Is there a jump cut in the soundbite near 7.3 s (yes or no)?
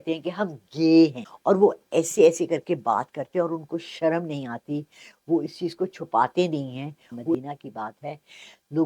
yes